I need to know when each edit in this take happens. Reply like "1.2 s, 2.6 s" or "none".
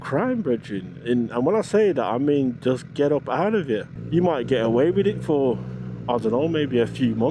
3.9 s